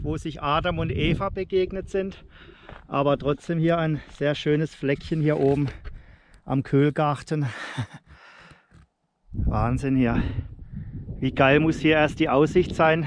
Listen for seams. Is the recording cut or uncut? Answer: uncut